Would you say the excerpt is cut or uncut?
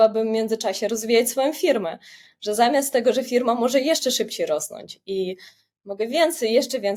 uncut